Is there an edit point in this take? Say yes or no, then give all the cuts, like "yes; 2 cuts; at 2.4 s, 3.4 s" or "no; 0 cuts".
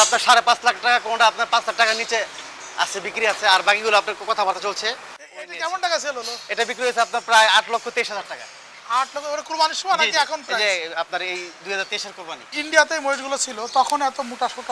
yes; 2 cuts; at 5.2 s, 12.5 s